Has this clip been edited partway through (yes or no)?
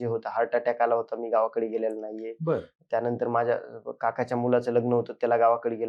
no